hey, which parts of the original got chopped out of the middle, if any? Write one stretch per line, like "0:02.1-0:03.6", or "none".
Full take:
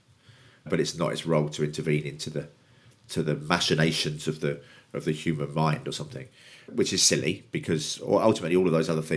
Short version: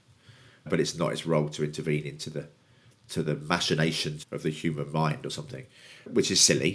0:04.1-0:04.7